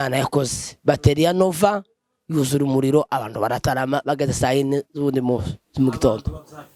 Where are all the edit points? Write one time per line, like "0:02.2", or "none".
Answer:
none